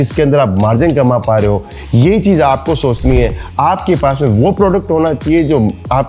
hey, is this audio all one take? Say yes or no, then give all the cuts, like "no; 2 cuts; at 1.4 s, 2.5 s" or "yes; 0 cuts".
yes; 0 cuts